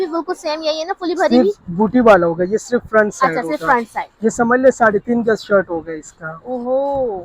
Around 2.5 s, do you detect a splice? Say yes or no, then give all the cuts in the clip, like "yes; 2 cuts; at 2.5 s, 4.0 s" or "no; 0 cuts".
no; 0 cuts